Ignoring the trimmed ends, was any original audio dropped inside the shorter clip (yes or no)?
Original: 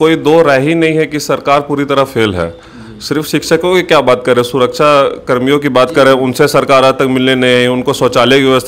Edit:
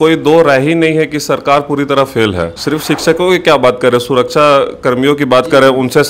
yes